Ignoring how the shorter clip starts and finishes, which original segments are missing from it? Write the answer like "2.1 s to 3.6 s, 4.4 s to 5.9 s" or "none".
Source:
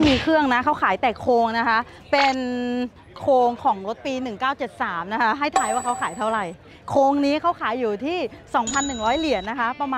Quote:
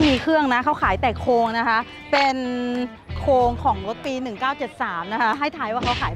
none

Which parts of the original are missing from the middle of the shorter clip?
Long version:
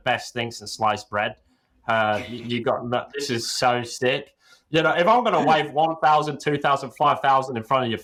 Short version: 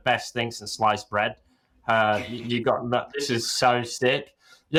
none

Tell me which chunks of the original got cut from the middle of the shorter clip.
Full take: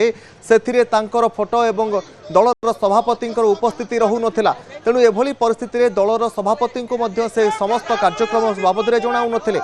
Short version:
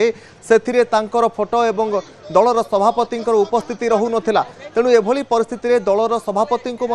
2.5 s to 2.6 s

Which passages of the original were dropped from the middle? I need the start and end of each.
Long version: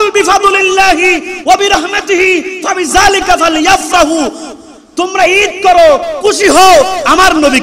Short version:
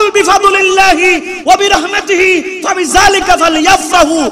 none

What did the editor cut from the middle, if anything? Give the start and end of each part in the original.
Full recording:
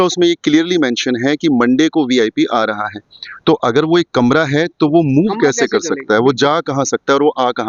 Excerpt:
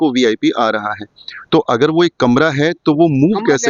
none

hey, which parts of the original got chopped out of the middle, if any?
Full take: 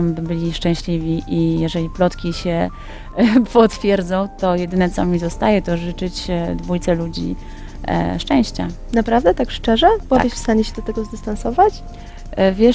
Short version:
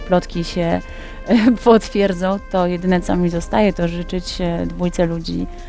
none

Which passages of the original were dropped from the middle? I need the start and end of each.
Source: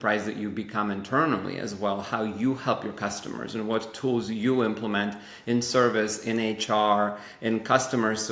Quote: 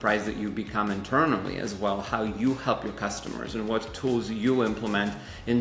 none

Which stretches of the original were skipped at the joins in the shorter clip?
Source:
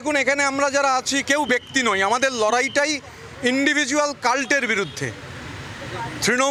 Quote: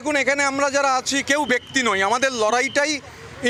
none

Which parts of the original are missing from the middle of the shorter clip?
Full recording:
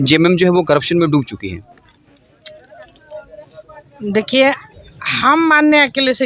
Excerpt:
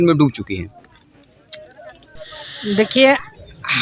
3.0 s to 3.5 s

